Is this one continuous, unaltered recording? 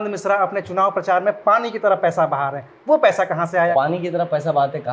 no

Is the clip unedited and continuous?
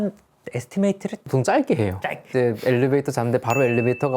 no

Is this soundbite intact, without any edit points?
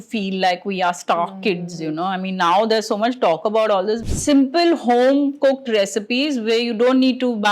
no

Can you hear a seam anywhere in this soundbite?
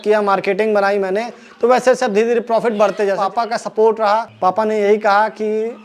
yes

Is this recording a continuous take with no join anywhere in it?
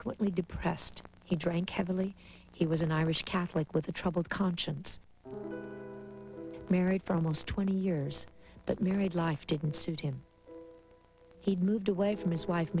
no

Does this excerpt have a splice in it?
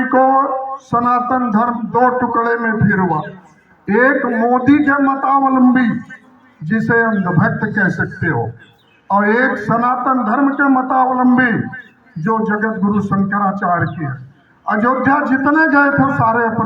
no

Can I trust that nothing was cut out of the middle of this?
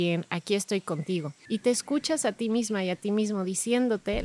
no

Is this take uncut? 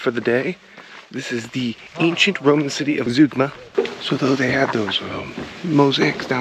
no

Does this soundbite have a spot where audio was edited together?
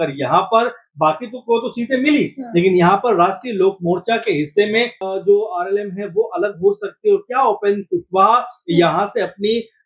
yes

